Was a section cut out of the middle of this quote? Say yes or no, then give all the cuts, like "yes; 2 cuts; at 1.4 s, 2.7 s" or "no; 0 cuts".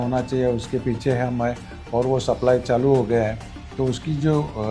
no; 0 cuts